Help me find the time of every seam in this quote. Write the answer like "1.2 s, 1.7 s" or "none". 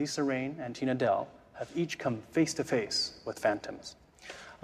3.0 s

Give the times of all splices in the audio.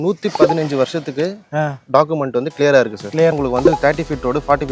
3.3 s

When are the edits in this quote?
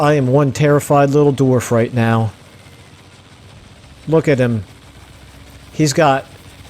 2.3 s, 4.0 s

